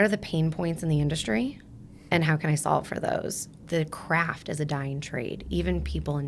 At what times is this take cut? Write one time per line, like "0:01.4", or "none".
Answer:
0:03.6